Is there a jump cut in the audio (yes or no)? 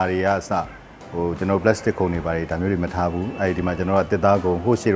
no